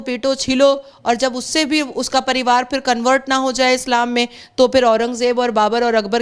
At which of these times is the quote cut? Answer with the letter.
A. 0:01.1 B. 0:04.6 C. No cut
C